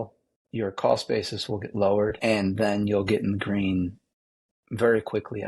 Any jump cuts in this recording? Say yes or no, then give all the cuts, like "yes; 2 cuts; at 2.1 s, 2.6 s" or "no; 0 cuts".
yes; 1 cut; at 2.2 s